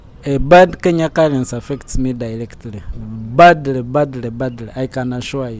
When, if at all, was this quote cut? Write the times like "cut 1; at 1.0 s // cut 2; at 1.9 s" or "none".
none